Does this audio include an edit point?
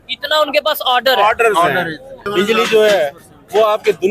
yes; 1 cut; at 2.3 s

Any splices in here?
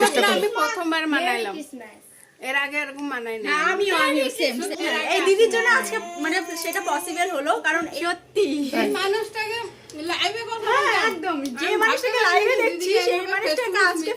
yes; 2 cuts; at 4.7 s, 8.0 s

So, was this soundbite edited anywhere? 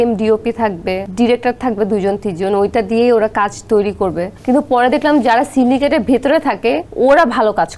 yes; 3 cuts; at 1.0 s, 4.3 s, 6.9 s

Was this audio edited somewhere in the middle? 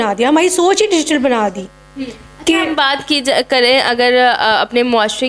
no; 0 cuts

